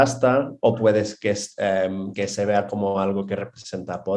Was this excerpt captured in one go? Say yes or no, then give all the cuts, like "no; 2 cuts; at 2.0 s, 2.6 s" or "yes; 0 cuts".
yes; 0 cuts